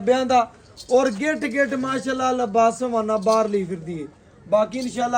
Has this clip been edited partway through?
no; 0 cuts

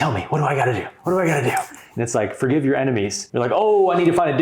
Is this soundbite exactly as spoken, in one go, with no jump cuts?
no; 1 cut; at 3.2 s

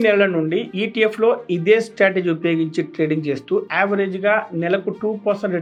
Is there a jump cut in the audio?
no; 0 cuts

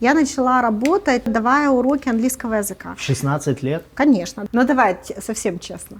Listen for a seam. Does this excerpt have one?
yes; 2 cuts; at 1.3 s, 4.3 s

